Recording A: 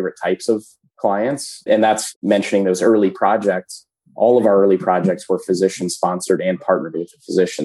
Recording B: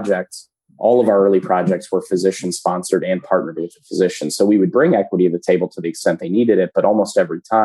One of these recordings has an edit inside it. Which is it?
A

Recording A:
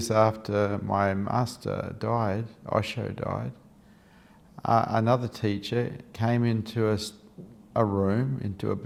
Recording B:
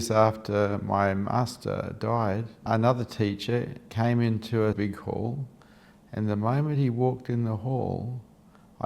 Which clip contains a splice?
B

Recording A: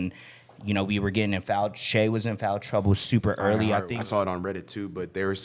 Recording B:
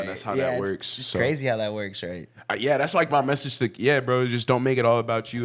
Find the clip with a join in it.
A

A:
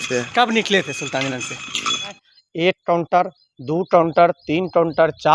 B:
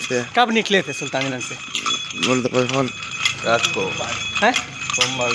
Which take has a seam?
A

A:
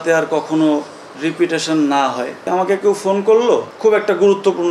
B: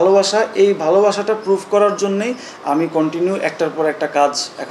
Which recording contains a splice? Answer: A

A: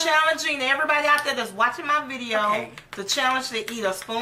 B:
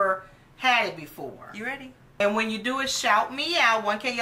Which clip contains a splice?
B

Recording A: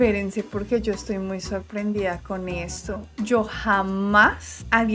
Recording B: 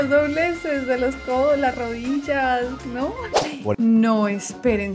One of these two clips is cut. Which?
B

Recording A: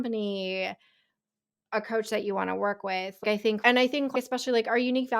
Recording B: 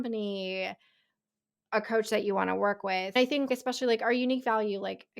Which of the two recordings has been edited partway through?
B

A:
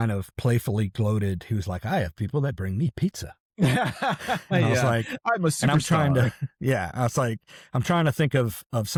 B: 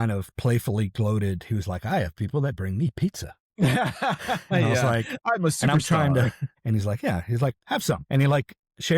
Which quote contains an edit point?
B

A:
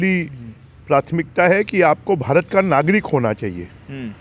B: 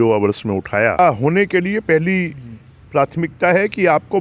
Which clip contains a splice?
B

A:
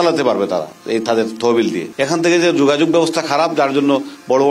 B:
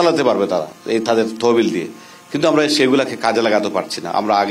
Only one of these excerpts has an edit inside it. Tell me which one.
A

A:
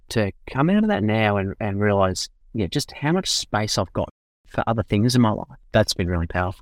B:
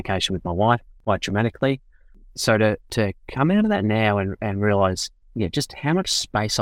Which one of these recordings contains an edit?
A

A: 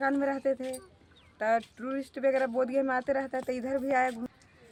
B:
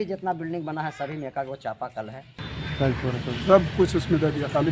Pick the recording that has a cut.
B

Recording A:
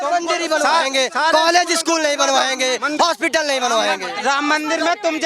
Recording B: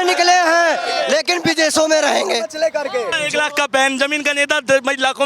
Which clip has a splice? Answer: B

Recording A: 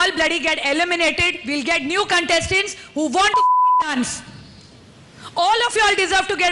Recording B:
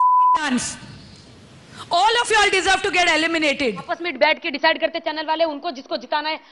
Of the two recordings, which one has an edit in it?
B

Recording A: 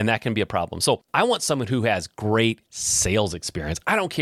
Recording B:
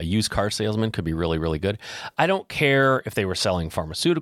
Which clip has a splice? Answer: A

